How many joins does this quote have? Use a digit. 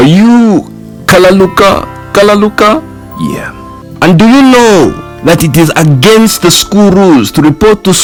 0